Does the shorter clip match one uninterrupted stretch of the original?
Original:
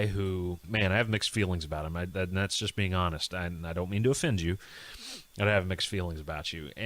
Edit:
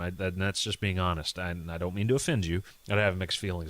no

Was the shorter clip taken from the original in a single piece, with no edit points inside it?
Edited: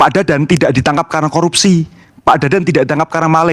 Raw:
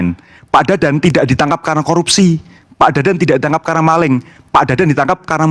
yes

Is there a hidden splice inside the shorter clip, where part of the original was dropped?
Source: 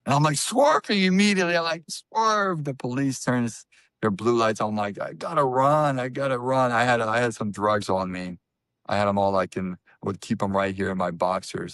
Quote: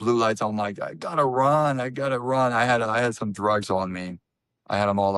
no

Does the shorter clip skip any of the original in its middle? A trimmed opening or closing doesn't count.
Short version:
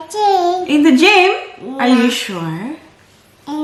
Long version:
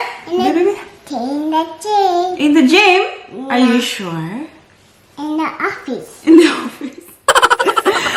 no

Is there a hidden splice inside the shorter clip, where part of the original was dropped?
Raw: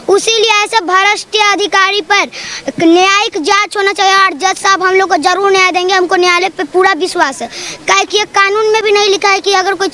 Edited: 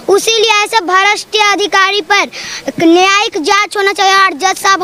no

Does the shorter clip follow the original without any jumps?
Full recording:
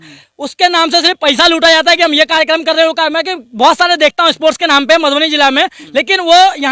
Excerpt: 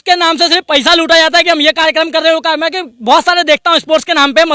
yes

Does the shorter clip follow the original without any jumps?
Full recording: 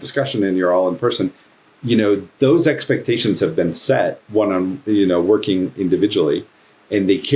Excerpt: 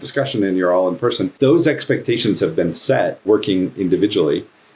no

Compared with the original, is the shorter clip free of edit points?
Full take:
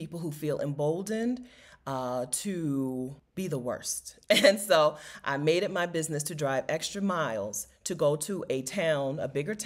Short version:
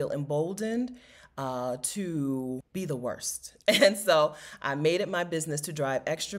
no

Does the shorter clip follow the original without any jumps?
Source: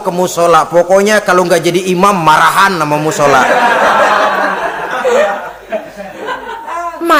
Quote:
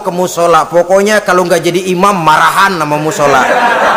yes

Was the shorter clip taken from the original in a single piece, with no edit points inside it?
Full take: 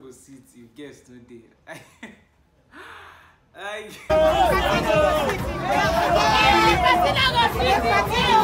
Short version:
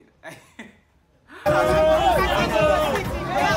no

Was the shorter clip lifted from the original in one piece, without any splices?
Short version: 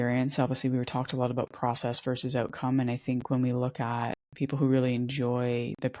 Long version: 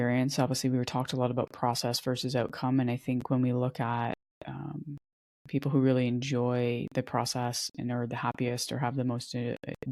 no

